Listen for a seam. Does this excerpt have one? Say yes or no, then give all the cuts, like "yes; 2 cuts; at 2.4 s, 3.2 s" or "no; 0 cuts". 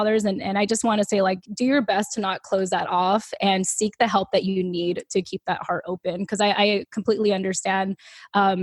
yes; 1 cut; at 1.5 s